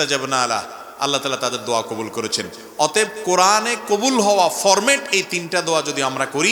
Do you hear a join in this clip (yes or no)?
no